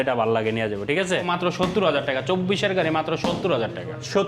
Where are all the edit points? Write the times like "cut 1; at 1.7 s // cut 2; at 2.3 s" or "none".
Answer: cut 1; at 1.3 s